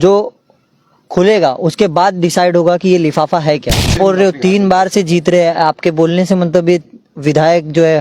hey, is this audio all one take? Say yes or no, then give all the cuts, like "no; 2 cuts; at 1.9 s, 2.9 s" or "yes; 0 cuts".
no; 1 cut; at 3.9 s